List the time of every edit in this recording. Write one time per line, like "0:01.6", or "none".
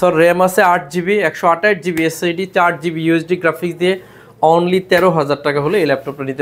none